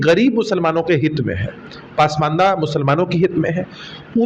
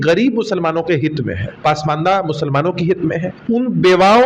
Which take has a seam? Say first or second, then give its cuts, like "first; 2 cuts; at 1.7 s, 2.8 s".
second; 2 cuts; at 1.4 s, 3.3 s